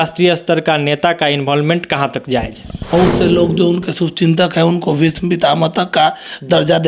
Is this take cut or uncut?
cut